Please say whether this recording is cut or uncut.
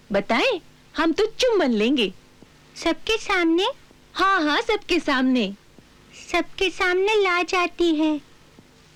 uncut